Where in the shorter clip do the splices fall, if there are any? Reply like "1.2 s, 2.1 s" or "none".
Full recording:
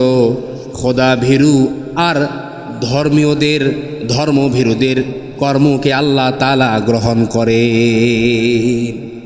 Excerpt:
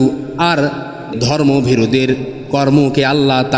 1.1 s